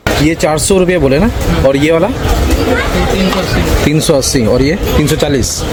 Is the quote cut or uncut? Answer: uncut